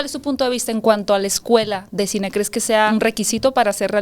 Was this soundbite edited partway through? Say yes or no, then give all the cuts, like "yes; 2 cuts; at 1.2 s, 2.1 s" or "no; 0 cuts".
yes; 1 cut; at 2.9 s